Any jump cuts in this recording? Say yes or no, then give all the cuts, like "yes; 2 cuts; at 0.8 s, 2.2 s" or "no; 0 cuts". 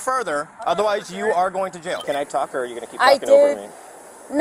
yes; 1 cut; at 2.0 s